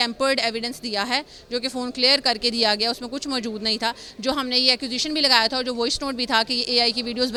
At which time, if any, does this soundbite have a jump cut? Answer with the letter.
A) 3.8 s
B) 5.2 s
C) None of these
C